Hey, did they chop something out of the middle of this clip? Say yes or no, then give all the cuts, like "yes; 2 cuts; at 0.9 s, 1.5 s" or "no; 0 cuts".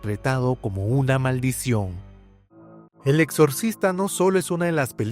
yes; 1 cut; at 2.7 s